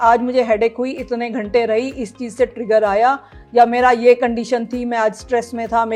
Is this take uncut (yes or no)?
yes